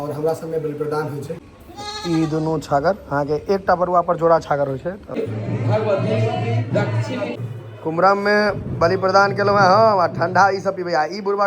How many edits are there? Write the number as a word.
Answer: three